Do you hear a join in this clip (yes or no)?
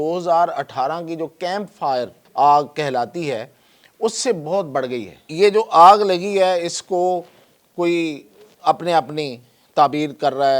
yes